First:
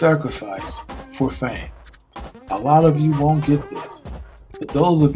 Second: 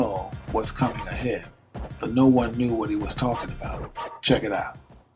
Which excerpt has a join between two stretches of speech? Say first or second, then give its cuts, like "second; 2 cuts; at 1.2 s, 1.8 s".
second; 1 cut; at 3.0 s